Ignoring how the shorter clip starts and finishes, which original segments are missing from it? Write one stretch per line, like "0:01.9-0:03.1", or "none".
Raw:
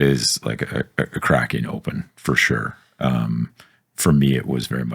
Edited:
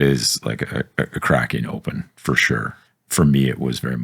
0:02.8-0:03.7